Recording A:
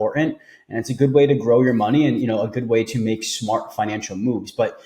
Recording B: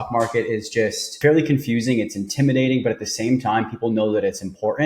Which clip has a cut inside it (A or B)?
B